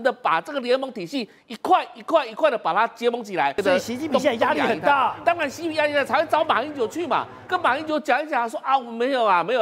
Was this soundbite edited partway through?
yes; 1 cut; at 3.6 s

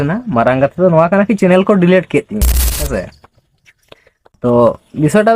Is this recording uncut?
yes; 0 cuts

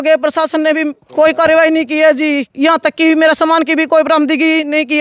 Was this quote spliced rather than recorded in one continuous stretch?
yes; 2 cuts; at 1.0 s, 2.5 s

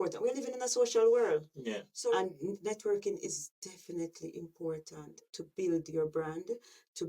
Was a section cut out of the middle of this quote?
yes; 1 cut; at 2.1 s

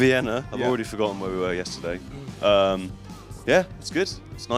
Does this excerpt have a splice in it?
yes; 1 cut; at 1.8 s

